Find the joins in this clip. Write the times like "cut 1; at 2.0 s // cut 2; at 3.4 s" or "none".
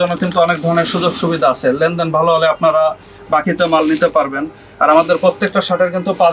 none